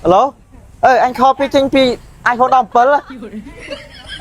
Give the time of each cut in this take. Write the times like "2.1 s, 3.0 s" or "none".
none

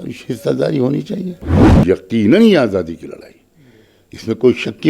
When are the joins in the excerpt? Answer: 1.6 s

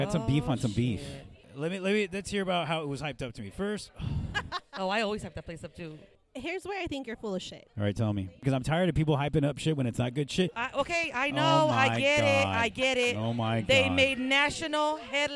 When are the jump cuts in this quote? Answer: 1.5 s, 6.1 s, 8.4 s, 10.6 s

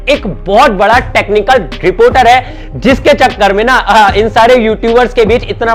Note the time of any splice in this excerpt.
none

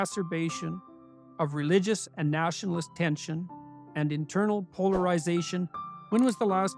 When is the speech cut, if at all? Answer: 5.8 s

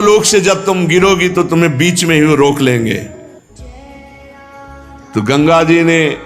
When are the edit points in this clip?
3.6 s, 5.1 s

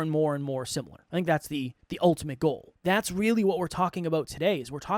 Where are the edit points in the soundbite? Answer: 1.0 s, 1.8 s, 2.7 s

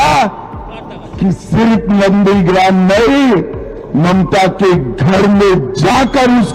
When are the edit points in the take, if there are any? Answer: none

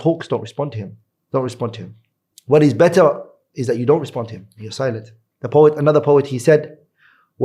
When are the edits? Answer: none

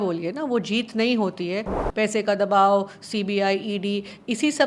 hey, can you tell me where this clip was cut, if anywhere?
1.8 s

